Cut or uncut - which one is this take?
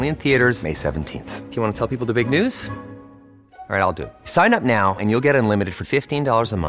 uncut